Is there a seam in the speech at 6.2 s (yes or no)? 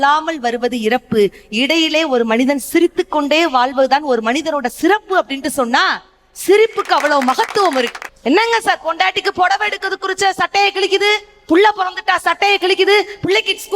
no